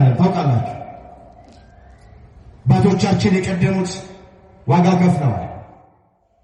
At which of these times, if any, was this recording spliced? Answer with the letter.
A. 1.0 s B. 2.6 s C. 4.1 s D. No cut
D